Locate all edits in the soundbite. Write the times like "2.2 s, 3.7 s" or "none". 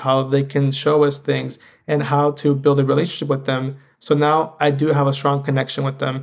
none